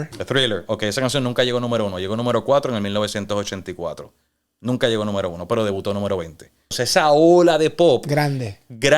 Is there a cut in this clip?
yes; 1 cut; at 6.8 s

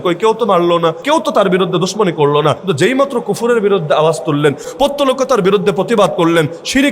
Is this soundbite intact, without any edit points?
no; 3 cuts; at 1.0 s, 2.6 s, 4.7 s

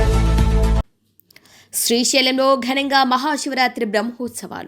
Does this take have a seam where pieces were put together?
yes; 1 cut; at 1.0 s

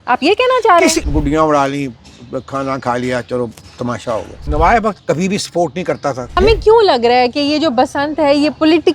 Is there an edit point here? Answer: yes; 3 cuts; at 1.0 s, 4.4 s, 6.3 s

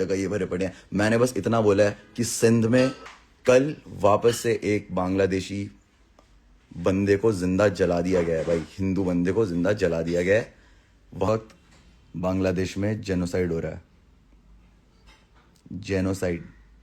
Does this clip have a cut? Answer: yes; 2 cuts; at 3.1 s, 11.3 s

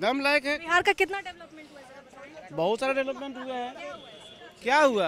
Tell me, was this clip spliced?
no; 0 cuts

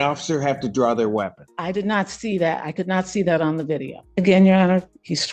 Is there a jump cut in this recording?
yes; 2 cuts; at 1.4 s, 4.0 s

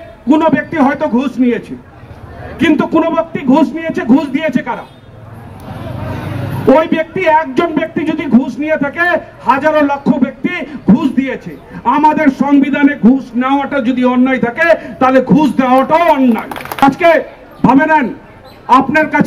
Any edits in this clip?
no; 0 cuts

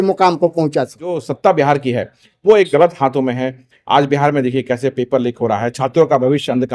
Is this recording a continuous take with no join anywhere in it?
no; 1 cut; at 1.3 s

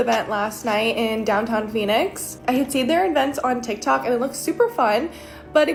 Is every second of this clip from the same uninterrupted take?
yes; 0 cuts

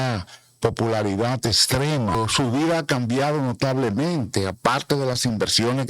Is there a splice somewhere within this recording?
yes; 1 cut; at 2.1 s

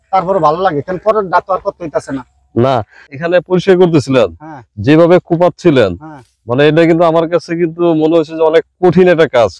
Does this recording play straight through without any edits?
yes; 0 cuts

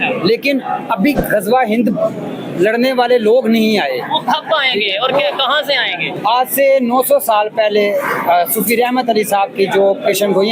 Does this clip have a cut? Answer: yes; 1 cut; at 6.1 s

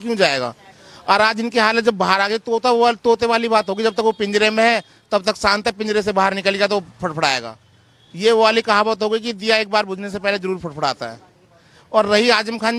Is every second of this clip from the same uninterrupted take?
yes; 0 cuts

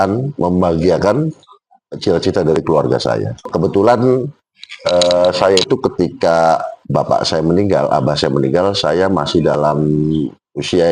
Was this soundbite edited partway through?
yes; 1 cut; at 3.4 s

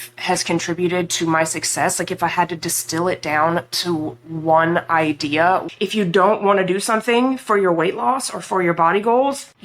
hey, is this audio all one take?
no; 1 cut; at 5.7 s

